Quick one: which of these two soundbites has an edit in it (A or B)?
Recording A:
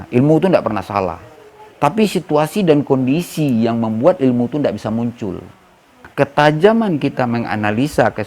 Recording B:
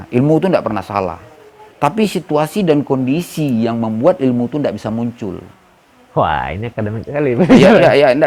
A